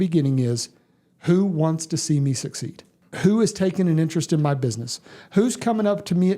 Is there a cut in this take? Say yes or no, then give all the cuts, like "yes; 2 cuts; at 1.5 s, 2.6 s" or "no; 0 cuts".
yes; 1 cut; at 3.0 s